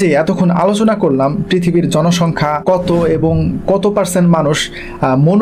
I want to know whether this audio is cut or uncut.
uncut